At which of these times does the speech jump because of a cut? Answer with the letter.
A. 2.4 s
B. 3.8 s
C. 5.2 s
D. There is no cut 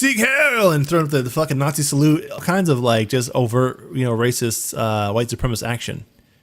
A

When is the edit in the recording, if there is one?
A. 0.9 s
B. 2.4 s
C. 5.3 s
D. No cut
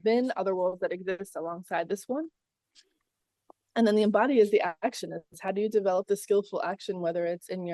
D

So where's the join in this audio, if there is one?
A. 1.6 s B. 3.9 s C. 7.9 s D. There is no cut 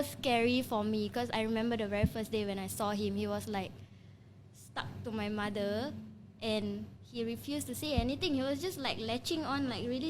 D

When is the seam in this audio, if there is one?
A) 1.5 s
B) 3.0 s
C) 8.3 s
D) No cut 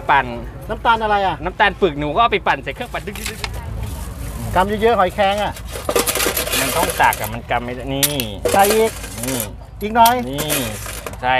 B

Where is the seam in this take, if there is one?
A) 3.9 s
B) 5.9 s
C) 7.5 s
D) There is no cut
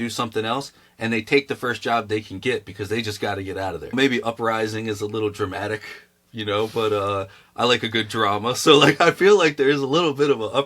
A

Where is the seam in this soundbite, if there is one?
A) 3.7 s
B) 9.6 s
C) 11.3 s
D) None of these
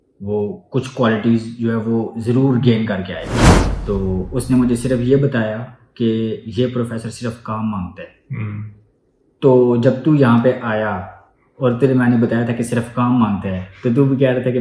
A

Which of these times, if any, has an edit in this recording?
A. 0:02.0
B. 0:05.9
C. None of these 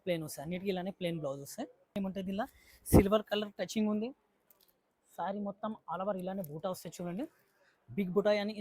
A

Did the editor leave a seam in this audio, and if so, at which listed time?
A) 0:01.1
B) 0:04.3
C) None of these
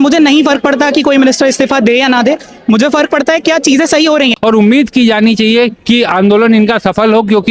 B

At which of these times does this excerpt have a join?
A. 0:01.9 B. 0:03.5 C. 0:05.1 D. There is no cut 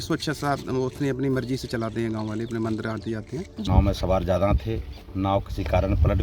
B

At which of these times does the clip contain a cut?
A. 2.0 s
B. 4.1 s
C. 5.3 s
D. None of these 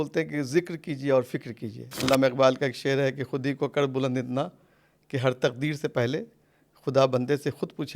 A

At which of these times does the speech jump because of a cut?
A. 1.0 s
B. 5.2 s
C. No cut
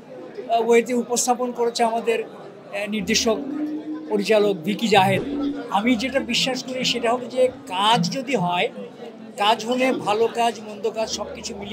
B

